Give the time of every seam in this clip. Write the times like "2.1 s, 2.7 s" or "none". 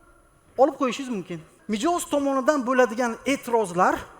1.5 s